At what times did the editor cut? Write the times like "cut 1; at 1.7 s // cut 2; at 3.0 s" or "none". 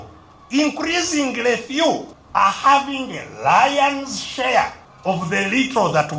cut 1; at 2.1 s // cut 2; at 4.9 s